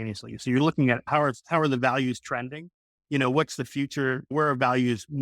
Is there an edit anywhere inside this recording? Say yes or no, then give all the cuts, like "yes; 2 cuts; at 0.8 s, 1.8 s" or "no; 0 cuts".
yes; 2 cuts; at 1.0 s, 4.3 s